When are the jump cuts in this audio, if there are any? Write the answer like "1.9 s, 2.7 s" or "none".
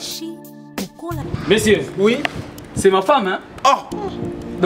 none